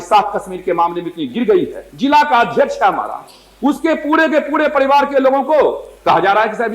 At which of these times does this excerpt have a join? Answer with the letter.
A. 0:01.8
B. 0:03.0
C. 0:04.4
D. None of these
A